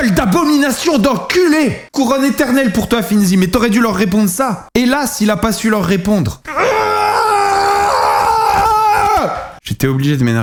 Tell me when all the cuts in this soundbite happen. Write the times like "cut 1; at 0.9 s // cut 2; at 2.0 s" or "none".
none